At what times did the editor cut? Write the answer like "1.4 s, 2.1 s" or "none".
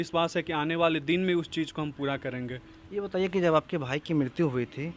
none